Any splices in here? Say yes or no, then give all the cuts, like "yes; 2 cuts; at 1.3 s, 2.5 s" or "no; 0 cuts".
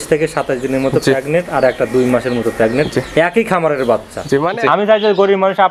yes; 1 cut; at 4.5 s